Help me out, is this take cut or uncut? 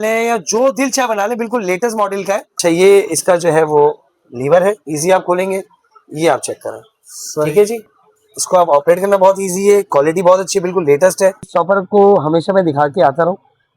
cut